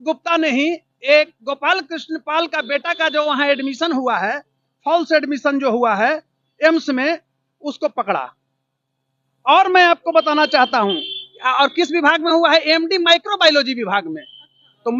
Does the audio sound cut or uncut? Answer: uncut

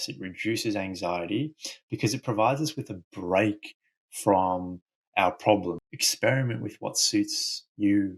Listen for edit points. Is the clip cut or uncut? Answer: cut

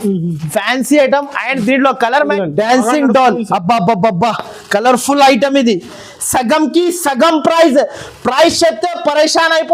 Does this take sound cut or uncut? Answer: cut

